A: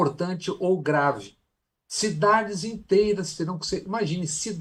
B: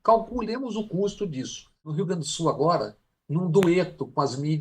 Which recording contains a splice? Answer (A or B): B